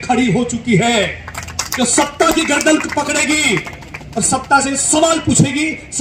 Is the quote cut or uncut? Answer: uncut